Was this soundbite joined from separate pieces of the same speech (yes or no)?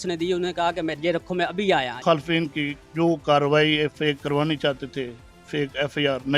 yes